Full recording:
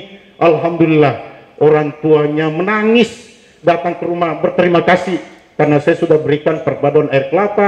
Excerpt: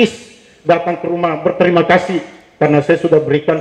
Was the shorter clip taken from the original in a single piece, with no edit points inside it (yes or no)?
yes